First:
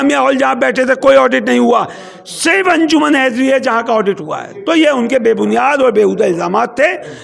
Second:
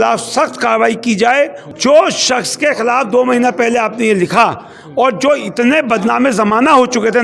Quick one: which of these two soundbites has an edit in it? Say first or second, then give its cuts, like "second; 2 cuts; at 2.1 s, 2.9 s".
second; 1 cut; at 1.7 s